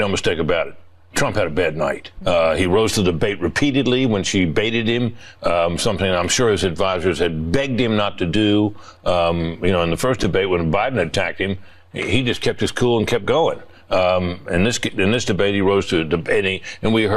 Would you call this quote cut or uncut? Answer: cut